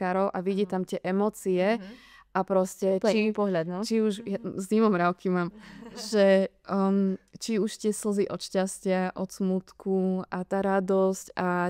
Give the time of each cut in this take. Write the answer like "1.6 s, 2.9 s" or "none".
none